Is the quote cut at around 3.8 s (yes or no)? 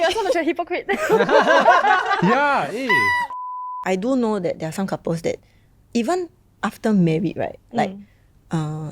yes